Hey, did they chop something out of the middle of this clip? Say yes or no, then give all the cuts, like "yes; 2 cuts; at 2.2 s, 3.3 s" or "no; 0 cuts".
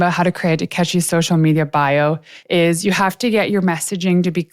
yes; 1 cut; at 2.3 s